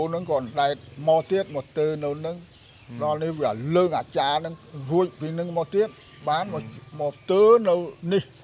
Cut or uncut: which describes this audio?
uncut